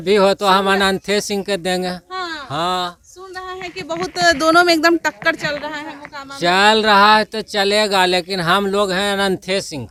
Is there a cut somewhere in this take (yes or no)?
no